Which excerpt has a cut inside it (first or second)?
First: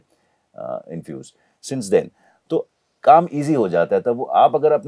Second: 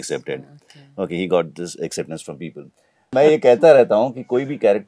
second